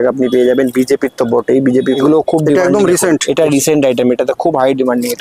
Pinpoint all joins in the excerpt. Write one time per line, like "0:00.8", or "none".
0:02.0